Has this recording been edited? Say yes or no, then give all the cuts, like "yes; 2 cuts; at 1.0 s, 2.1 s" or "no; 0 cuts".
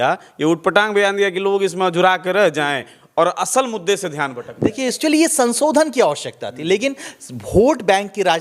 yes; 1 cut; at 5.0 s